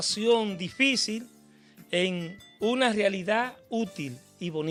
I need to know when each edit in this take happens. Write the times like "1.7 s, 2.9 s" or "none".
none